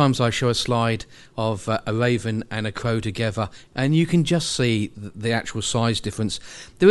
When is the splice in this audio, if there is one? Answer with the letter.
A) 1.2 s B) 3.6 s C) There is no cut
B